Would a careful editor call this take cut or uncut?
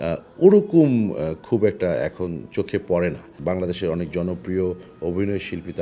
cut